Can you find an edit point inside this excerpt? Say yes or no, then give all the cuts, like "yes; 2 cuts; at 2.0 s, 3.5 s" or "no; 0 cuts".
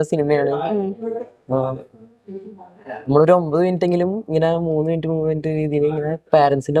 no; 0 cuts